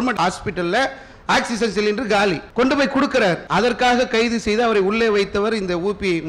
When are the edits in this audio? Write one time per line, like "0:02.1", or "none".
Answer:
0:02.4
0:03.4